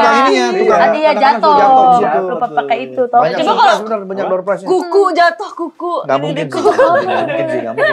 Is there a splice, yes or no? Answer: no